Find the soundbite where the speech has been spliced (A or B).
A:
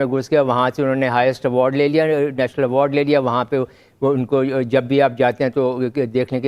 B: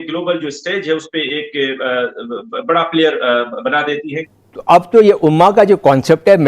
B